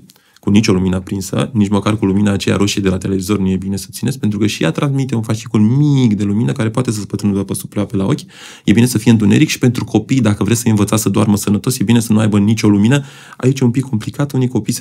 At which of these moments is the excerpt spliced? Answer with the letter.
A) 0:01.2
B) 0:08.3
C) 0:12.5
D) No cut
D